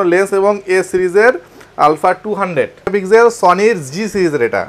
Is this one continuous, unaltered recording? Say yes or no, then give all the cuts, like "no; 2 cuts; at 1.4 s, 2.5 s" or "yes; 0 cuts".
no; 1 cut; at 2.9 s